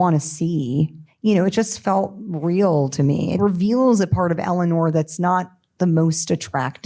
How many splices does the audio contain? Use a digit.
2